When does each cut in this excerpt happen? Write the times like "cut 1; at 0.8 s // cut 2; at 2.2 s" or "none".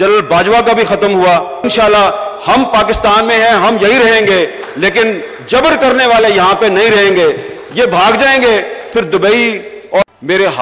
cut 1; at 1.5 s // cut 2; at 9.7 s